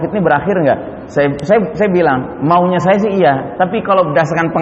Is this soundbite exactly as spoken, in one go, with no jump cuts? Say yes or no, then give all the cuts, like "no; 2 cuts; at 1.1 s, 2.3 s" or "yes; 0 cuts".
yes; 0 cuts